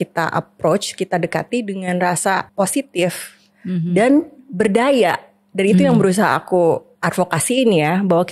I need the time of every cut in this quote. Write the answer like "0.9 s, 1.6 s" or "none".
2.5 s, 6.9 s